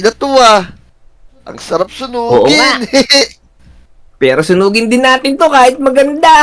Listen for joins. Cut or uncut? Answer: uncut